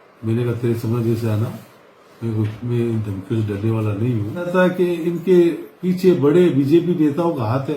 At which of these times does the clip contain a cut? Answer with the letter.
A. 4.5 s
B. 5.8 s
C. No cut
A